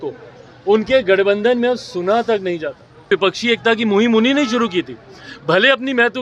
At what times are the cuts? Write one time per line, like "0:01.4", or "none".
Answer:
0:03.1